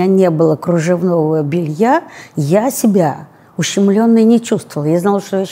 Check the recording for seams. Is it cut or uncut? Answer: uncut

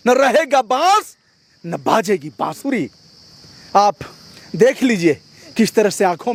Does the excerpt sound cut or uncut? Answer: uncut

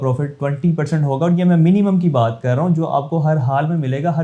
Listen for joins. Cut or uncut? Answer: uncut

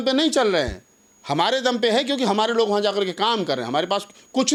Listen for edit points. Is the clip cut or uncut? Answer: uncut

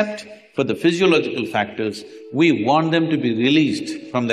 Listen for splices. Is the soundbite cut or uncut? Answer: uncut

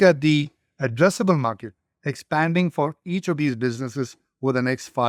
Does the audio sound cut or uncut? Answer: uncut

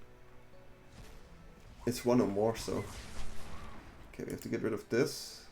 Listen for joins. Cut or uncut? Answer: uncut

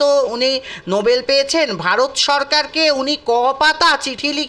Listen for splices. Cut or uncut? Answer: uncut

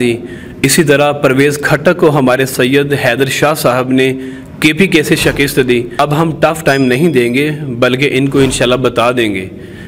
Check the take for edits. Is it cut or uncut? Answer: cut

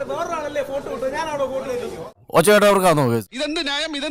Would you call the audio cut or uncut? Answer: uncut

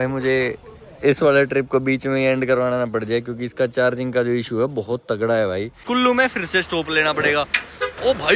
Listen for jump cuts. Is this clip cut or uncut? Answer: cut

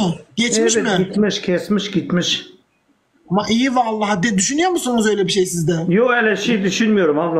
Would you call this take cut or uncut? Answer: uncut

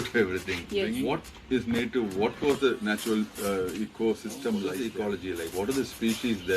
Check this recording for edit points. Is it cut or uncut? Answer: cut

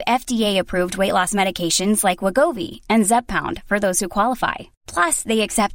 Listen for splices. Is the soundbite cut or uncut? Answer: uncut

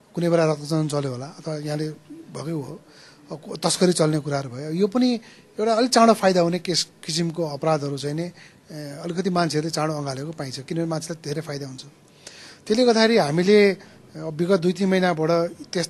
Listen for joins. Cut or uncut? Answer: uncut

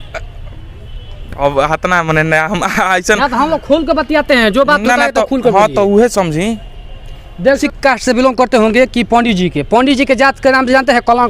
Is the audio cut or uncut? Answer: cut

